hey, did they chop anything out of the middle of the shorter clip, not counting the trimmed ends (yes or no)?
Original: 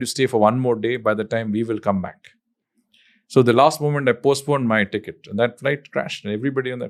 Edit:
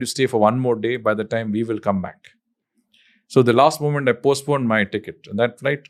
no